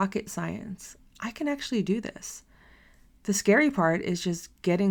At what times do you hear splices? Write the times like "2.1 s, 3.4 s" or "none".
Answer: none